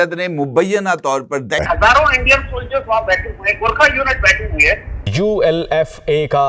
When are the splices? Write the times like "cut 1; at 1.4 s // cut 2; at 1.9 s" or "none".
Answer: cut 1; at 1.6 s // cut 2; at 5.0 s